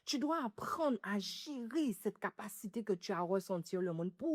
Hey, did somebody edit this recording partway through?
no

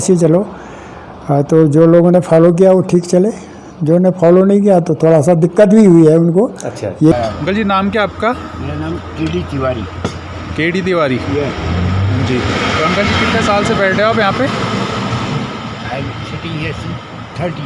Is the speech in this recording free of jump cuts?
no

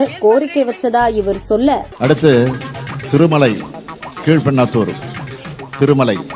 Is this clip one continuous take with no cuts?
no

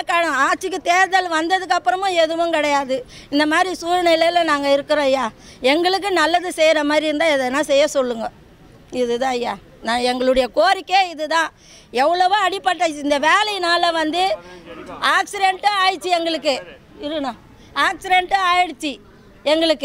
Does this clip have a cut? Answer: no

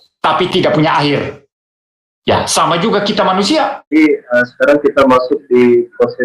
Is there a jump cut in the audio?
yes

